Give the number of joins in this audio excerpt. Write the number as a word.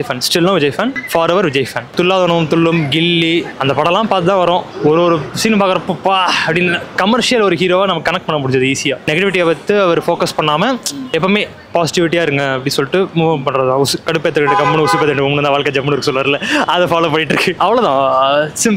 zero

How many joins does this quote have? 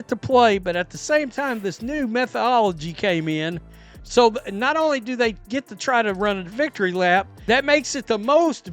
one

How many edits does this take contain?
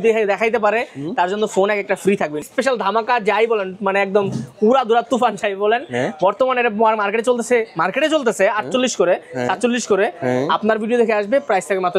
one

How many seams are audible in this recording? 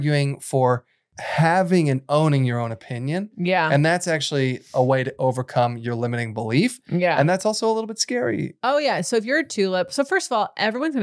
one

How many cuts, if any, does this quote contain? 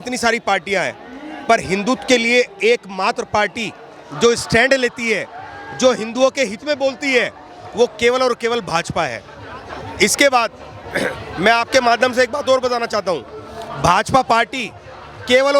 zero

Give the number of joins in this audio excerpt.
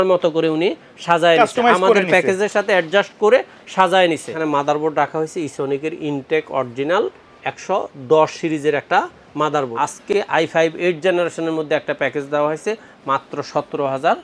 two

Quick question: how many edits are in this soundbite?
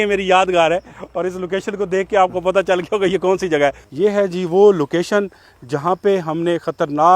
one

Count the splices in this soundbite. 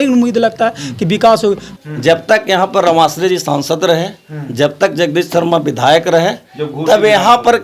one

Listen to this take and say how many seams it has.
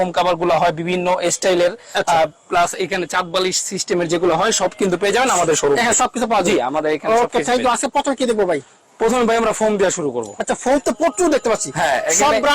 zero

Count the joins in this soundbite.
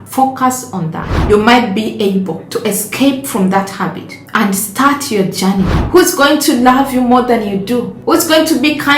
two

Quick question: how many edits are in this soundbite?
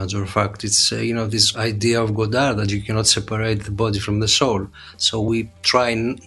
two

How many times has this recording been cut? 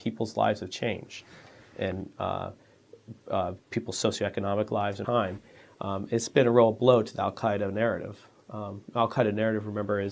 zero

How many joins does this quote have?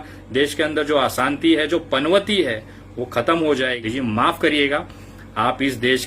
one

